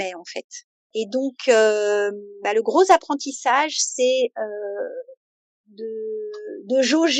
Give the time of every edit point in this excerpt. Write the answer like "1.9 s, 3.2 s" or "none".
none